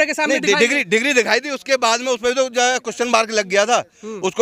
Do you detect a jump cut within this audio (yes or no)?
no